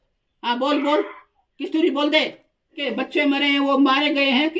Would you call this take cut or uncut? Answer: cut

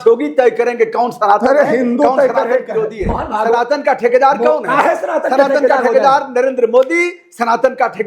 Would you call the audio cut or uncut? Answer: cut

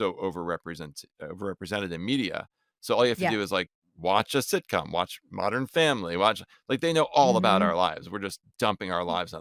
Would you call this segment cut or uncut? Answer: uncut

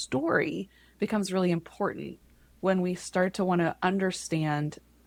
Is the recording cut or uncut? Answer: uncut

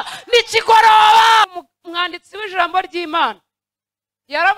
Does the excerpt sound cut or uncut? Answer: cut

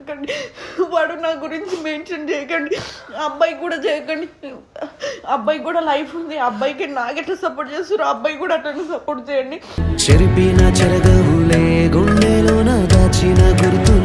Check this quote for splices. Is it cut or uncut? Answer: uncut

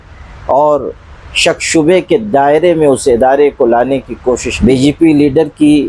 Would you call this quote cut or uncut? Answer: cut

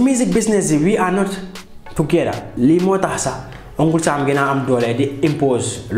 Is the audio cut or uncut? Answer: cut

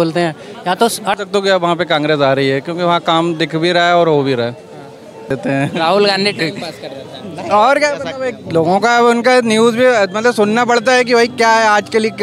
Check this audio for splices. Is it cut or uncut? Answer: cut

